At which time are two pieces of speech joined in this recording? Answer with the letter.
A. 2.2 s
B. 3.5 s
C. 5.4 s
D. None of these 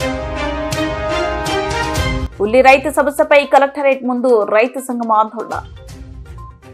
A